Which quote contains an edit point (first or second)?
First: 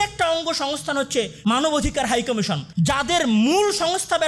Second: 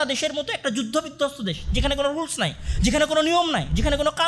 first